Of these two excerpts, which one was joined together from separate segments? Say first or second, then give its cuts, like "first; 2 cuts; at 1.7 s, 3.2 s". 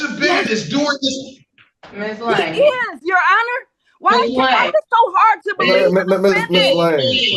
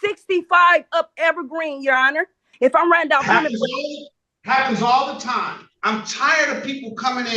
second; 2 cuts; at 2.5 s, 5.7 s